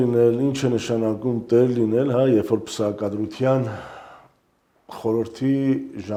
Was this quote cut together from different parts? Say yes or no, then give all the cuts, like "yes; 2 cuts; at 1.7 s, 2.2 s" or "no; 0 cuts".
no; 0 cuts